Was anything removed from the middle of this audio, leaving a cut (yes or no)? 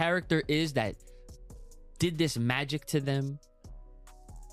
no